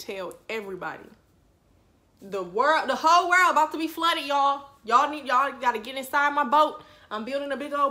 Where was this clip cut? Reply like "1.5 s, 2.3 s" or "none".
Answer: none

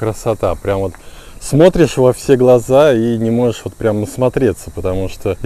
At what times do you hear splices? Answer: none

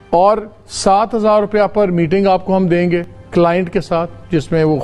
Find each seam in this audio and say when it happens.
none

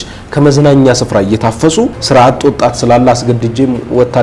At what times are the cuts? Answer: 2.0 s

